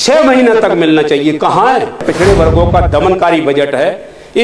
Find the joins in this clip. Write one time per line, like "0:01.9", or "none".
0:02.0

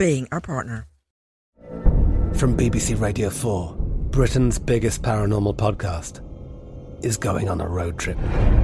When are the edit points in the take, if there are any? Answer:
0:01.2

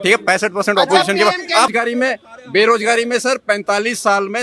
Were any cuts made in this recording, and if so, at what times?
0:01.7

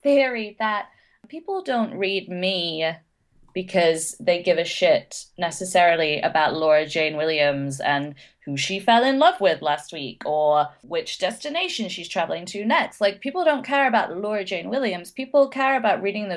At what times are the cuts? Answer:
0:01.3
0:10.8

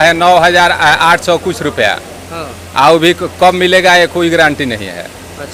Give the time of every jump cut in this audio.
none

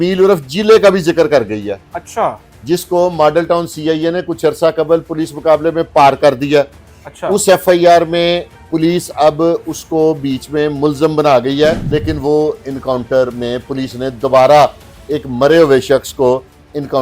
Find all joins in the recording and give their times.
0:11.8

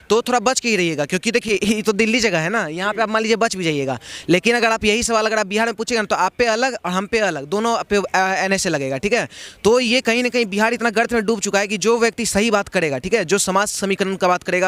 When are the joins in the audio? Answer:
none

